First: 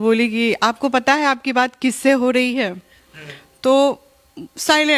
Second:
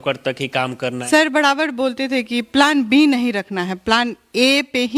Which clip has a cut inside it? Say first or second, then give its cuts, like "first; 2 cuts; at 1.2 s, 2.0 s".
second; 1 cut; at 1.0 s